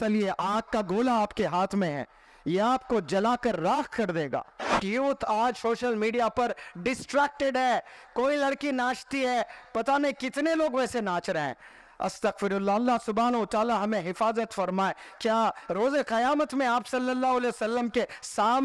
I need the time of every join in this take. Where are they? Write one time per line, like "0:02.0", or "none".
0:04.8